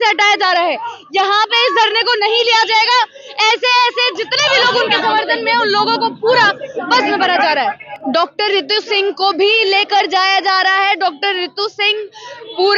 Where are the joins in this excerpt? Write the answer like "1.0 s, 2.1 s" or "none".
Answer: 7.9 s